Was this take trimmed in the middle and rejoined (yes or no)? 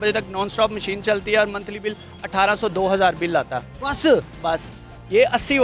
no